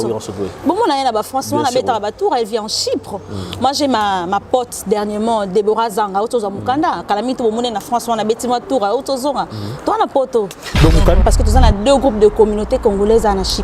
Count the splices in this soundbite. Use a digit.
1